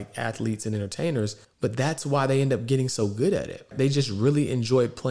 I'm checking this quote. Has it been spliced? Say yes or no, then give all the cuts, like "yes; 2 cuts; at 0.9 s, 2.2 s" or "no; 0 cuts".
yes; 2 cuts; at 1.4 s, 3.7 s